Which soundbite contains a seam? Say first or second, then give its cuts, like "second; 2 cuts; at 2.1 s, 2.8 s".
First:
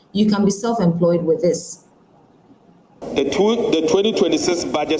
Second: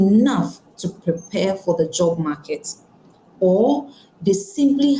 first; 1 cut; at 2.9 s